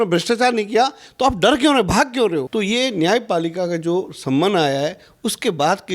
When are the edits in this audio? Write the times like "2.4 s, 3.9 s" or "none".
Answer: 2.5 s